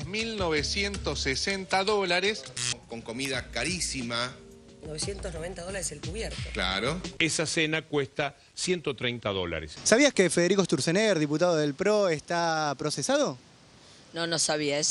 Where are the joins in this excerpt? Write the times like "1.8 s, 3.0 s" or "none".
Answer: 7.1 s